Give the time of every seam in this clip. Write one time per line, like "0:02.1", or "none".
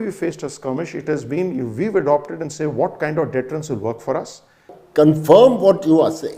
0:04.8